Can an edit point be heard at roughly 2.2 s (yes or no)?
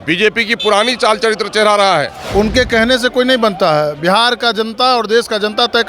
yes